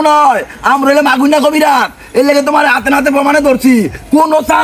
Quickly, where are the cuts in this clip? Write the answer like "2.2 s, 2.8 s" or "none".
none